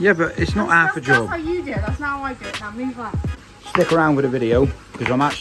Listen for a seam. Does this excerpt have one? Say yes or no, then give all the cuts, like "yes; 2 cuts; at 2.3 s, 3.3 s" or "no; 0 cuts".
yes; 1 cut; at 3.3 s